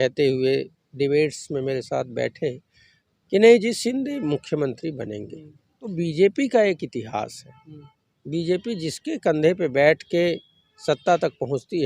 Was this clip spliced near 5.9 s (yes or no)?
yes